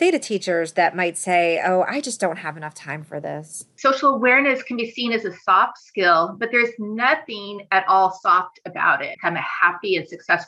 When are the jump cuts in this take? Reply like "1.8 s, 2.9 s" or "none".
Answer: 3.7 s, 9.1 s